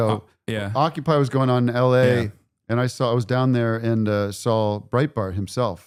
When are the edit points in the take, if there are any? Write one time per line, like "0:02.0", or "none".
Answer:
none